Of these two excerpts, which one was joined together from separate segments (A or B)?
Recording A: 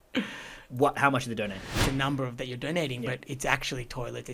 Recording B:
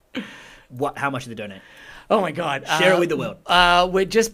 A